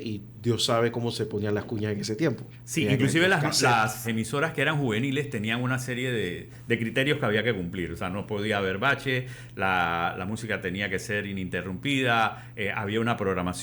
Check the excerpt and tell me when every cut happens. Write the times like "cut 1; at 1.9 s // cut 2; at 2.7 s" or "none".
cut 1; at 2.5 s // cut 2; at 4.1 s